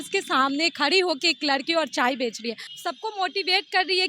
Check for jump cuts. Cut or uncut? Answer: cut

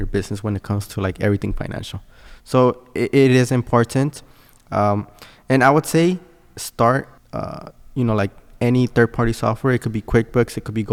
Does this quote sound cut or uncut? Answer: uncut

